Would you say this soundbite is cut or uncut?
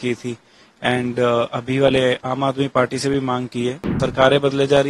cut